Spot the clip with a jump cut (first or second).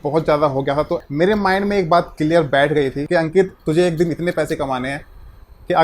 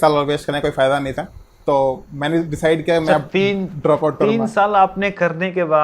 first